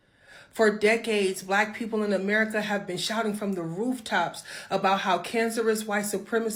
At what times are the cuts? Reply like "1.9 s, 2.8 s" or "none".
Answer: none